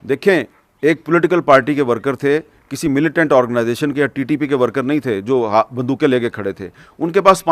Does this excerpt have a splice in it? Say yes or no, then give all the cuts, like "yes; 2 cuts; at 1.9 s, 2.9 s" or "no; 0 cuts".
no; 0 cuts